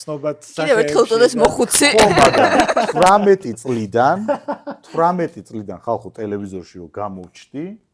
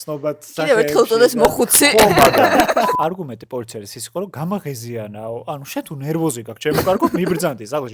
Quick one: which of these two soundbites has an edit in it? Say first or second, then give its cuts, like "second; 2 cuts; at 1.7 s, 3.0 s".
second; 1 cut; at 2.9 s